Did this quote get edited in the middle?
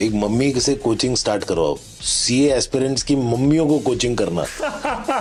no; 0 cuts

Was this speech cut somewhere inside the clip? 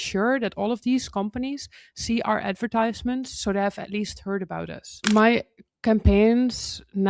yes; 1 cut; at 5.0 s

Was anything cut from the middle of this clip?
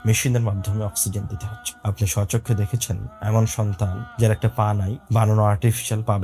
no; 0 cuts

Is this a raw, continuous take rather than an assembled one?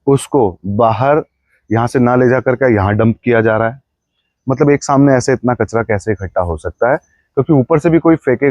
yes; 0 cuts

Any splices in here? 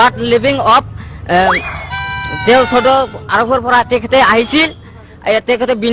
no; 0 cuts

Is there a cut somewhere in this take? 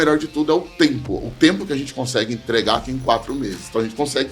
no; 0 cuts

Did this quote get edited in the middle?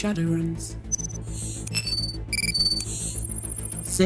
no; 0 cuts

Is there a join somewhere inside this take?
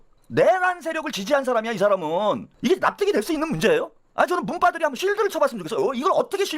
yes; 1 cut; at 2.5 s

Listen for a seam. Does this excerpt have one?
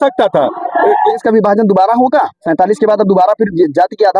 yes; 2 cuts; at 1.2 s, 2.4 s

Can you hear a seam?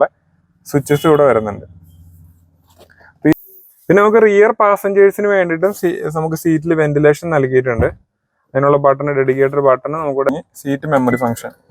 yes; 2 cuts; at 3.3 s, 10.3 s

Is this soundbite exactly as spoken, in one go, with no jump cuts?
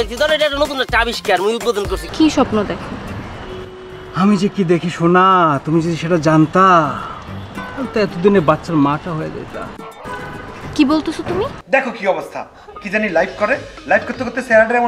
no; 2 cuts; at 2.0 s, 11.6 s

